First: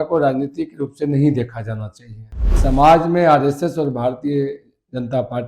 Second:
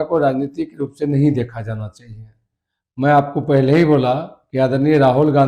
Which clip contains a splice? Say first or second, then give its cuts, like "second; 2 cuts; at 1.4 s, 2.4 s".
first; 1 cut; at 2.5 s